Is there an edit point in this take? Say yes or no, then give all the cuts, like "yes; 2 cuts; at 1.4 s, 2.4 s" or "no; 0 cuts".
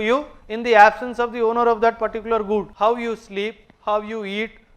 yes; 1 cut; at 2.7 s